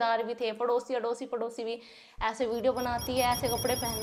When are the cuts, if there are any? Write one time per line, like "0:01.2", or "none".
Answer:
none